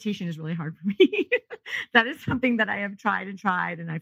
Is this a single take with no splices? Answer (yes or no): yes